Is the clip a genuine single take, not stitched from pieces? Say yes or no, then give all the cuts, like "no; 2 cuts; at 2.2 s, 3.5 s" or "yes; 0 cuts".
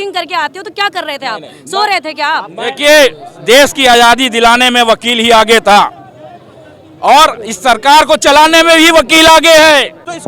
yes; 0 cuts